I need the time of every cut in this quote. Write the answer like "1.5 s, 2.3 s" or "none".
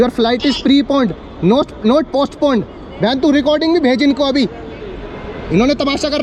none